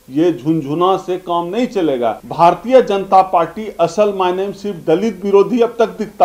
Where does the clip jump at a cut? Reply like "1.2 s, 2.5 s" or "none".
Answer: 2.2 s